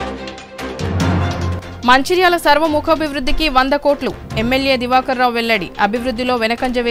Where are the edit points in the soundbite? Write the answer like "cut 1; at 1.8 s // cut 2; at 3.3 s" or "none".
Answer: cut 1; at 1.1 s